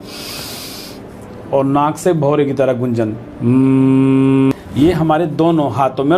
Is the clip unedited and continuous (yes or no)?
no